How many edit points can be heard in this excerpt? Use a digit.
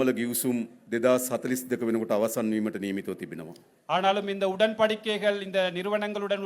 0